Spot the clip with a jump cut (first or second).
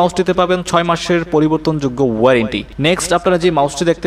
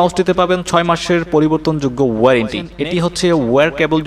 second